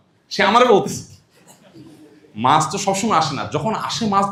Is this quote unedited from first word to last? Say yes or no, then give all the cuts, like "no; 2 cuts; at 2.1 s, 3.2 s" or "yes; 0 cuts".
yes; 0 cuts